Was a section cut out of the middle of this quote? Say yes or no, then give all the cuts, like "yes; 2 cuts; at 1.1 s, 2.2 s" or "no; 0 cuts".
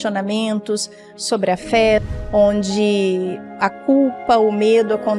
yes; 1 cut; at 2.0 s